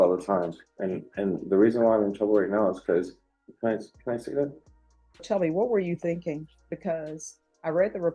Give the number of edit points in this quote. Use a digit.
1